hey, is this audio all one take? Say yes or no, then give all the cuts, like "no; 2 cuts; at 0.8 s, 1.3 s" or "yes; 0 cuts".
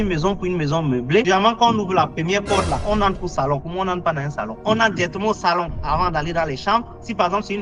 no; 1 cut; at 4.6 s